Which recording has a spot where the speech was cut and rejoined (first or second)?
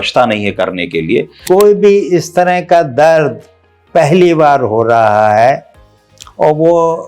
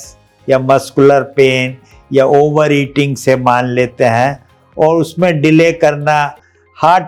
first